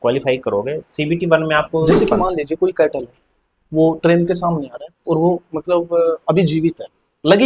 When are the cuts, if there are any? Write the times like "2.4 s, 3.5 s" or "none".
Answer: 1.9 s